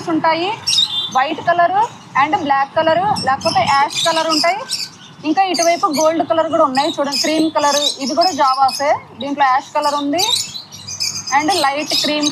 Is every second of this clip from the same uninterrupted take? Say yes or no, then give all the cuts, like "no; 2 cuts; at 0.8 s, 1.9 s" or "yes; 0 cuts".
yes; 0 cuts